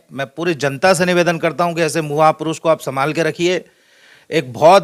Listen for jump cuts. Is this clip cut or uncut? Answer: uncut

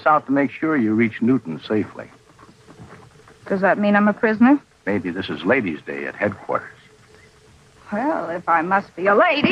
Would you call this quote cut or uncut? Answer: cut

